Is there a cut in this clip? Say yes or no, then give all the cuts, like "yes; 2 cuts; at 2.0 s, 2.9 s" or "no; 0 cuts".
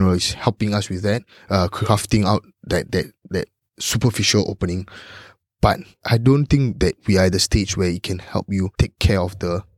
yes; 3 cuts; at 5.9 s, 7.0 s, 8.7 s